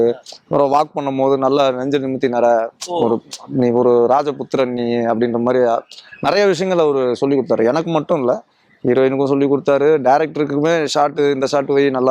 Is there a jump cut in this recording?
no; 0 cuts

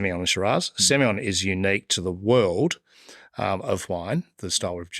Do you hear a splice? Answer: no; 0 cuts

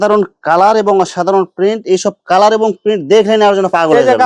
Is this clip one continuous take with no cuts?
yes; 0 cuts

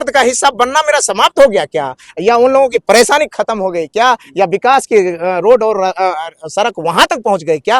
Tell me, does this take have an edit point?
no; 0 cuts

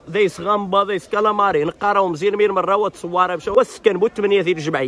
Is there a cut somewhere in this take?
yes; 1 cut; at 3.4 s

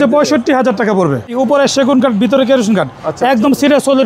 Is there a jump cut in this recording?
yes; 1 cut; at 1.3 s

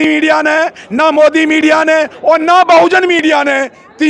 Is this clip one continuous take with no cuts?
yes; 0 cuts

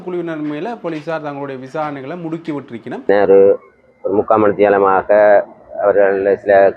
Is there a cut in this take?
yes; 1 cut; at 3.1 s

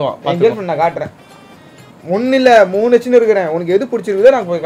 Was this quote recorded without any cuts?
yes; 0 cuts

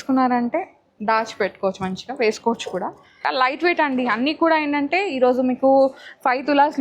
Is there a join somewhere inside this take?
yes; 1 cut; at 3.1 s

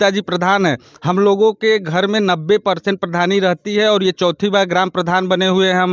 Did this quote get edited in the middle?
no; 0 cuts

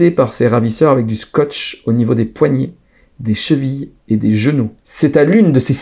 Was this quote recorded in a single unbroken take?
no; 1 cut; at 4.8 s

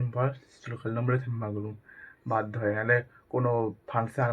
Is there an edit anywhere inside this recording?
no; 0 cuts

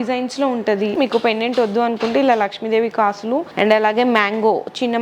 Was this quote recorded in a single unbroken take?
no; 2 cuts; at 0.9 s, 3.5 s

